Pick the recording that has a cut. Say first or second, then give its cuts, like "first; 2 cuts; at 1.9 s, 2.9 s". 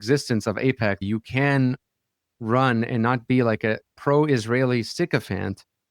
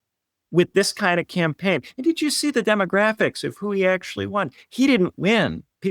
first; 1 cut; at 1.0 s